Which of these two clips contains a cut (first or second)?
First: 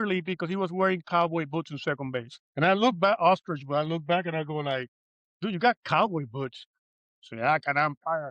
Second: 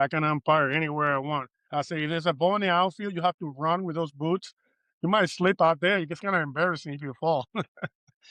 first